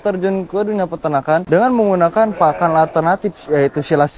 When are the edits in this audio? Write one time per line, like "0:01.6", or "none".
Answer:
0:01.4